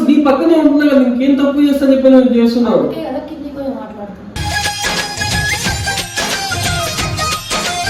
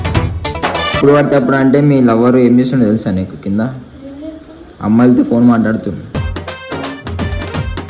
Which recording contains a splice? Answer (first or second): second